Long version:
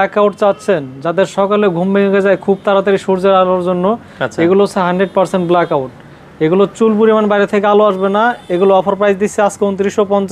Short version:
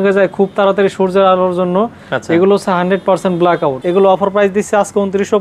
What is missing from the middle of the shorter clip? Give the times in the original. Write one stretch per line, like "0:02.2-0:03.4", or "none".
0:05.9-0:08.4